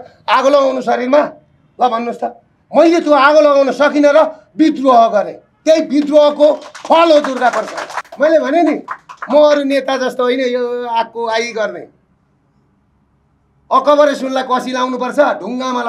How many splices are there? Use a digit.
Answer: 1